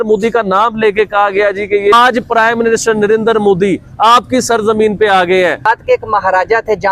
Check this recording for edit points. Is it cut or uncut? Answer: cut